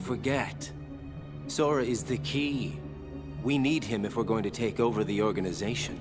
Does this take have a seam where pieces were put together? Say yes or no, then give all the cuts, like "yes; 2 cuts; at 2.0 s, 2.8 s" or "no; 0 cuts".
no; 0 cuts